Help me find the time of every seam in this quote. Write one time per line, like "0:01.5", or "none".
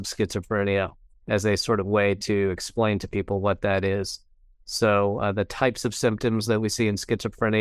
none

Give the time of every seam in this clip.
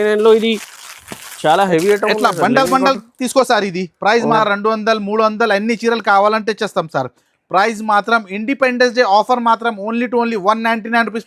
0:04.4

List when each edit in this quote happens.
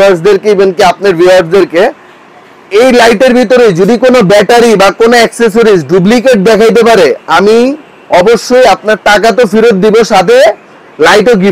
none

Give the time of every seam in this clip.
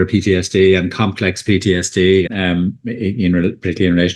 0:02.3

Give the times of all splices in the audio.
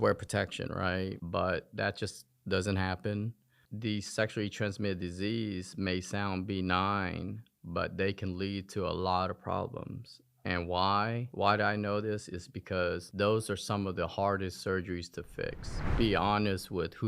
0:03.7
0:15.9

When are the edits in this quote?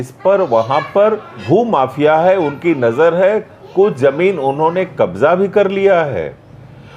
0:01.4

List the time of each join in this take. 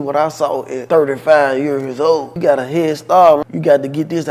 0:02.3
0:03.4

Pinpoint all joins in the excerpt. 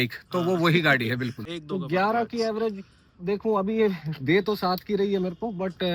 0:01.5

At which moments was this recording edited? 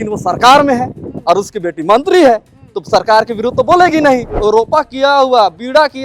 0:04.3

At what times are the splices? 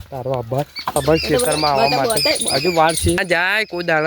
0:01.0
0:03.2

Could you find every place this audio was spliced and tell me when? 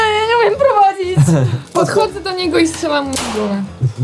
0:01.7

